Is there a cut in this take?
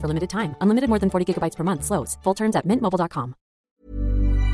yes; 1 cut; at 3.6 s

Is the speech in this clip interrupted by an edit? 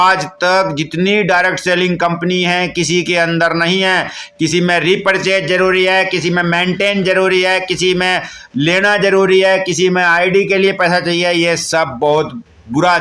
no; 0 cuts

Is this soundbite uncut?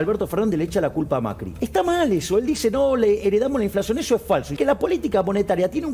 no; 2 cuts; at 1.4 s, 4.5 s

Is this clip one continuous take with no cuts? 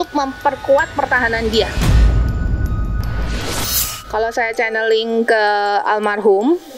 no; 2 cuts; at 1.7 s, 3.9 s

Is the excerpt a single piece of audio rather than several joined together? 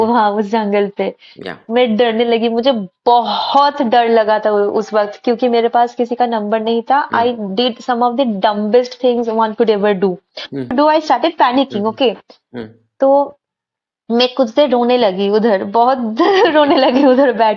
no; 1 cut; at 10.7 s

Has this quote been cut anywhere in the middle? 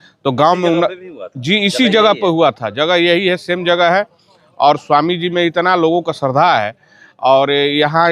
no; 0 cuts

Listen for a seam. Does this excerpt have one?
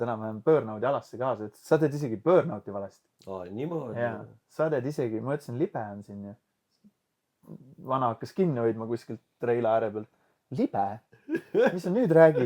no; 0 cuts

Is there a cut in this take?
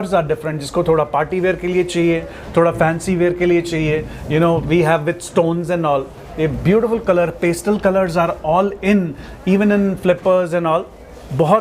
no; 0 cuts

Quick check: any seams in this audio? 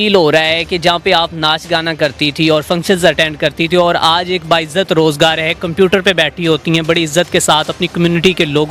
no; 0 cuts

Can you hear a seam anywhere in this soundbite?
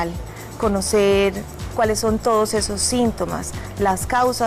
yes; 1 cut; at 1.5 s

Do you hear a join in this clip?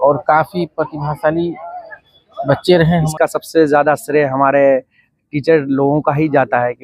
yes; 1 cut; at 3.1 s

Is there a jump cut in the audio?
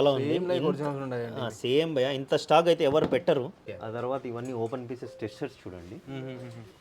yes; 1 cut; at 3.6 s

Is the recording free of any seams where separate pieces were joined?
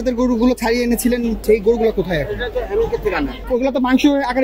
no; 2 cuts; at 1.4 s, 3.4 s

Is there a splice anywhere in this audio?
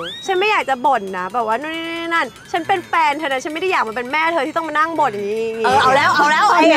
no; 0 cuts

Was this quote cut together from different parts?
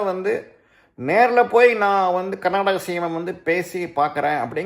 no; 0 cuts

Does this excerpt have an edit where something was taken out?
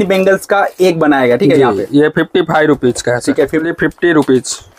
yes; 1 cut; at 3.7 s

